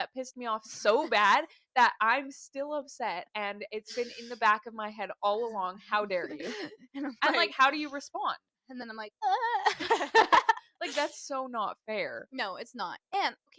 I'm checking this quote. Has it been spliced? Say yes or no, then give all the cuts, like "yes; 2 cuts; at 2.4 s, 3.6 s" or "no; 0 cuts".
no; 0 cuts